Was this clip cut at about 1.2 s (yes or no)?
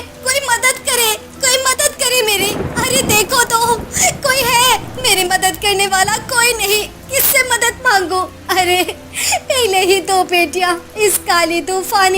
no